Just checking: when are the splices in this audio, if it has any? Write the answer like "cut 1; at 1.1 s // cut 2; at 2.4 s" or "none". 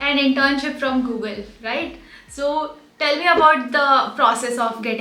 none